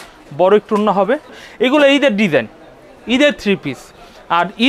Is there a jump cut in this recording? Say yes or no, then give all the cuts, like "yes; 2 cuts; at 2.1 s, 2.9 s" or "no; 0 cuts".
yes; 1 cut; at 1.4 s